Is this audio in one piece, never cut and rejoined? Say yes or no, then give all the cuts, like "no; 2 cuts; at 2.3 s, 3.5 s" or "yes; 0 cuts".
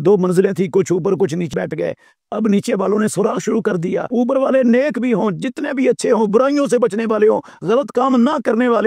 no; 2 cuts; at 1.5 s, 4.1 s